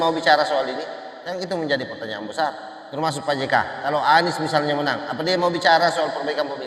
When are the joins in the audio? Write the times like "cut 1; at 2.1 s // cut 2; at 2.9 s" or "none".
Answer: none